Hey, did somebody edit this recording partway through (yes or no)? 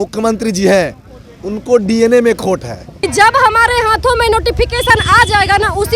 yes